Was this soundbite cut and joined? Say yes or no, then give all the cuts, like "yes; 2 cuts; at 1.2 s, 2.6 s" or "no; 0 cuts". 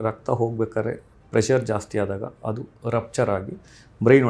no; 0 cuts